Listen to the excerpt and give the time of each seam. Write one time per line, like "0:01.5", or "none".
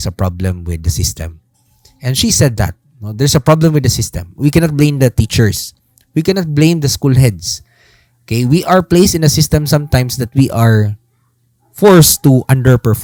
none